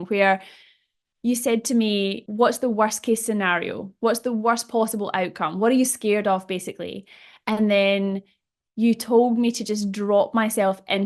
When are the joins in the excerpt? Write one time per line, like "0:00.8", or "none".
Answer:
0:02.2